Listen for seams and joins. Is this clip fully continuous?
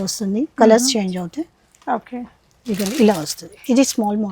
yes; 0 cuts

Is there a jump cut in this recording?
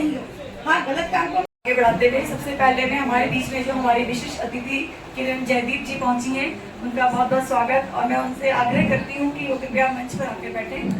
yes; 1 cut; at 1.5 s

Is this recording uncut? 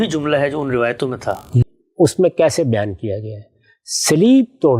no; 1 cut; at 1.5 s

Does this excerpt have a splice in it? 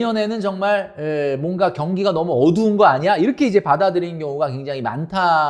no; 0 cuts

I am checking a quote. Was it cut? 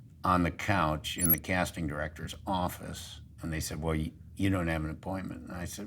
yes; 1 cut; at 3.2 s

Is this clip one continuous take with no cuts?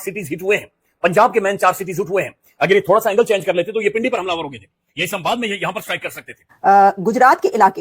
no; 1 cut; at 6.4 s

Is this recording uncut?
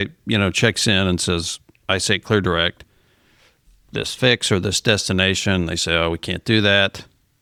yes; 0 cuts

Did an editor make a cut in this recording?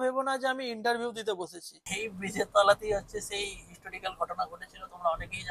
yes; 1 cut; at 1.8 s

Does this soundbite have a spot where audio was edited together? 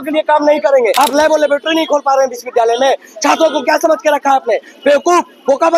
yes; 1 cut; at 0.9 s

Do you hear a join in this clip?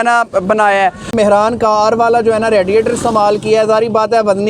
yes; 1 cut; at 1.1 s

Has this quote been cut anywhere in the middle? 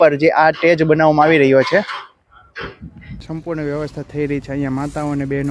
yes; 1 cut; at 3.2 s

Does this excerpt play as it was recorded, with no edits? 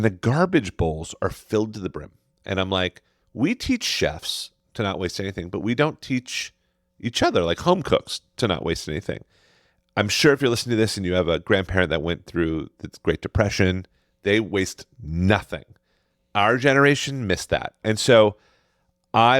no; 1 cut; at 17.8 s

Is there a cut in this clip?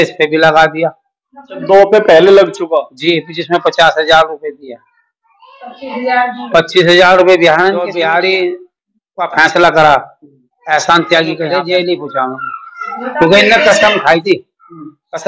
yes; 2 cuts; at 7.9 s, 11.5 s

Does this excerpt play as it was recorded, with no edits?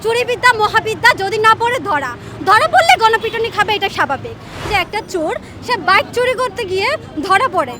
no; 1 cut; at 4.7 s

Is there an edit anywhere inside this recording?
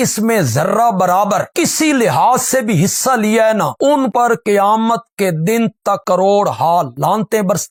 no; 0 cuts

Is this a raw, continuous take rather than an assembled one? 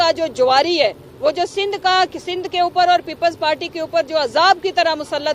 yes; 0 cuts

